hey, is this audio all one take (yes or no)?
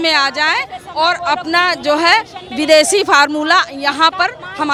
yes